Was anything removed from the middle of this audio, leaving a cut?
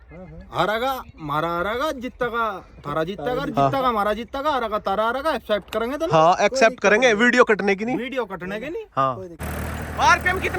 yes; 1 cut; at 9.4 s

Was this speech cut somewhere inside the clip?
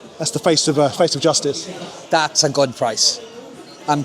yes; 1 cut; at 1.9 s

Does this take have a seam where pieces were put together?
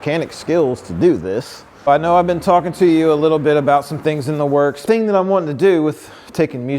yes; 2 cuts; at 1.9 s, 4.8 s

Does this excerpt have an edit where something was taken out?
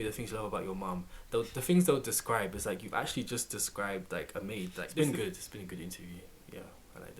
yes; 1 cut; at 4.9 s

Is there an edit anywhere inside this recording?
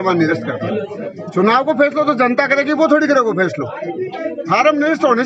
yes; 1 cut; at 1.1 s

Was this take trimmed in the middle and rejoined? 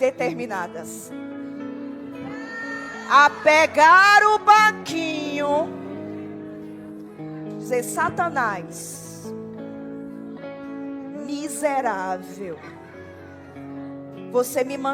no; 0 cuts

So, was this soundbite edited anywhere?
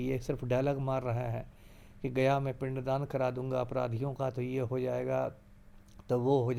no; 0 cuts

